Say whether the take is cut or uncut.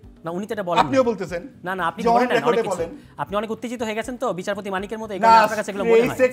uncut